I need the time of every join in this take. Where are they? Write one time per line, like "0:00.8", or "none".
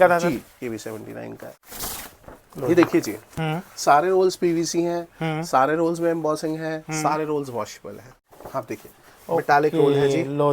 0:01.6
0:08.2